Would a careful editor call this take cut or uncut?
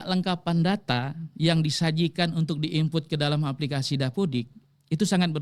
uncut